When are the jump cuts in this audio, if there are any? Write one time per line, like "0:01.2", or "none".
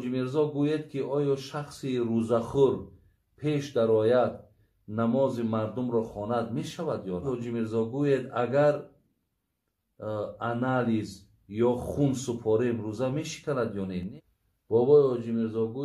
0:07.3
0:14.1